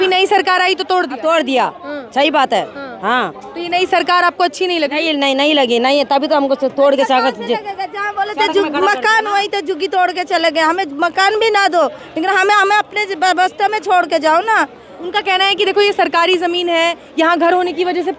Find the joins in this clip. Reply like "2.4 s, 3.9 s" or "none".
none